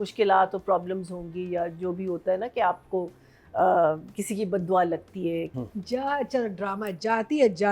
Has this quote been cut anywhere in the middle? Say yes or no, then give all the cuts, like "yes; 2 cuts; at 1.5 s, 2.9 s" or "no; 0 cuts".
yes; 1 cut; at 5.5 s